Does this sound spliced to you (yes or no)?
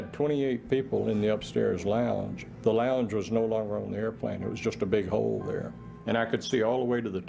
no